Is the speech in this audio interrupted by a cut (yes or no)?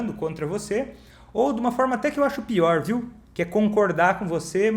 no